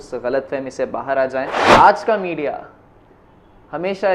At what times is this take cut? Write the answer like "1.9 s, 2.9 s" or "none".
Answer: 1.6 s